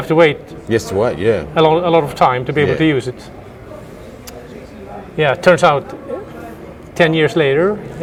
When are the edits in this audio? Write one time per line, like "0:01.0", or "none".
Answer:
none